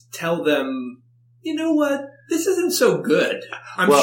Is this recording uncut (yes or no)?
yes